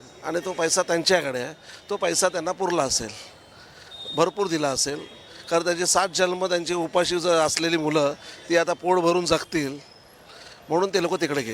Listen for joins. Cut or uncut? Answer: uncut